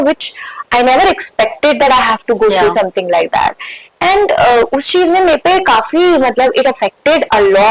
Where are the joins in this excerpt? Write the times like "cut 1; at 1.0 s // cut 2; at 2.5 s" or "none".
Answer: none